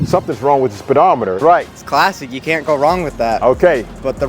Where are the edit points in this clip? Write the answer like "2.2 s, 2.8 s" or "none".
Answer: 1.4 s